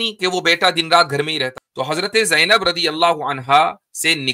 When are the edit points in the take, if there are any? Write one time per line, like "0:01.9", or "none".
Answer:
0:01.6